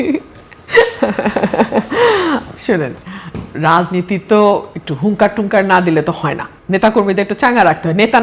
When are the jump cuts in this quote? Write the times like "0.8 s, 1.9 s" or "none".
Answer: none